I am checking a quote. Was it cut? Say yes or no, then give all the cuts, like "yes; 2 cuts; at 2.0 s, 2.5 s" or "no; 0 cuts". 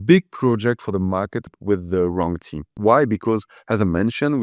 yes; 2 cuts; at 1.5 s, 2.7 s